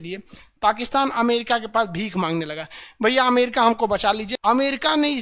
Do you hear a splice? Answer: yes; 1 cut; at 4.3 s

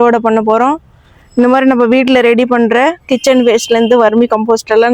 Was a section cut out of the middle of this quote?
no; 0 cuts

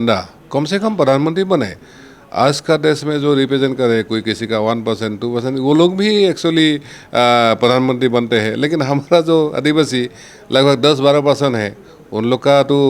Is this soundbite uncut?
yes; 0 cuts

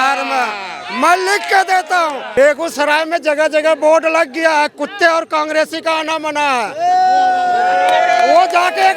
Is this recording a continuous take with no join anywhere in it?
no; 1 cut; at 2.2 s

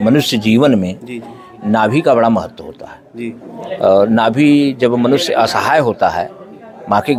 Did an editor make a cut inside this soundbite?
no; 0 cuts

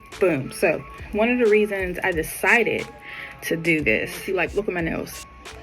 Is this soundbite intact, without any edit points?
no; 2 cuts; at 0.9 s, 4.2 s

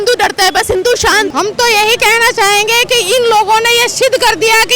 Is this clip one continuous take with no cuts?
no; 1 cut; at 1.3 s

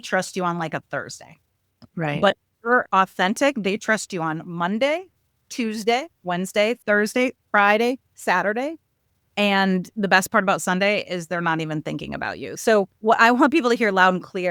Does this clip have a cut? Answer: yes; 1 cut; at 12.9 s

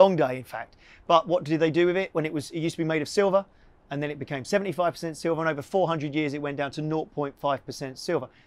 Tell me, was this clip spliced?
no; 0 cuts

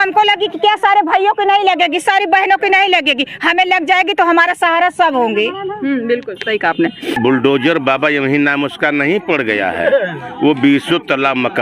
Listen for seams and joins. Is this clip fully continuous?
no; 1 cut; at 7.1 s

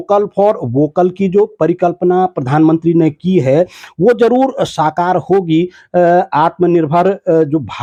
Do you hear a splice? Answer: no; 0 cuts

